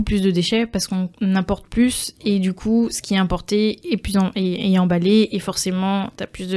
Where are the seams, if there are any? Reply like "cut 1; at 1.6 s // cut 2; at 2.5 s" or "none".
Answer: cut 1; at 1.1 s